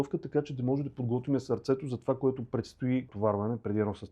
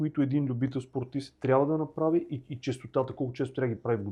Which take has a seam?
first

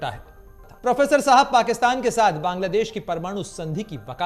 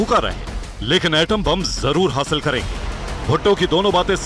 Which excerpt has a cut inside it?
first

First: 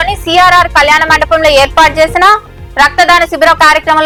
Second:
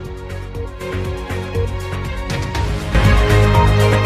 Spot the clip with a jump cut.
second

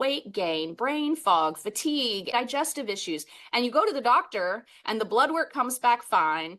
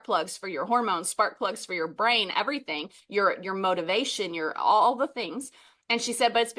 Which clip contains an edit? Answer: first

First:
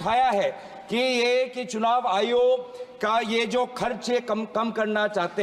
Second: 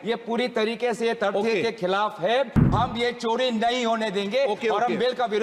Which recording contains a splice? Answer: second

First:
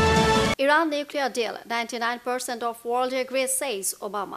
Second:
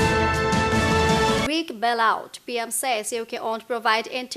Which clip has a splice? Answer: second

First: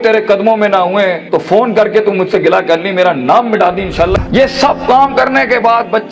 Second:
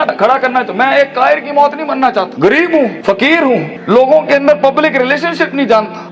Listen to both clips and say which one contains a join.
first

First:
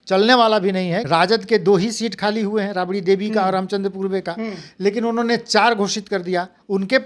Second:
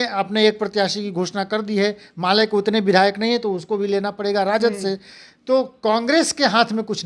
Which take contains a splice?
first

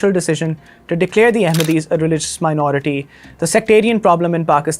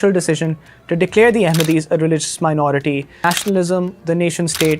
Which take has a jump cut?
second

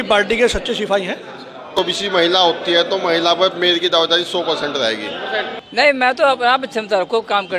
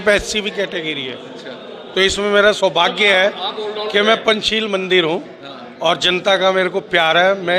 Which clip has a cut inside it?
first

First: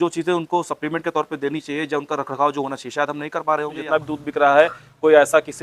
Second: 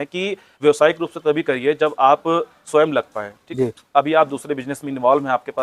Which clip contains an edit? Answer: first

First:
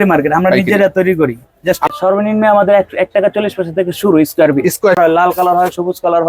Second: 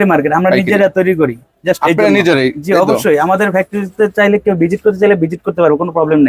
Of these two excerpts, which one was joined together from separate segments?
first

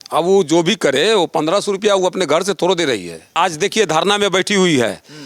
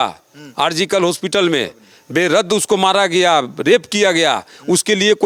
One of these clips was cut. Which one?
first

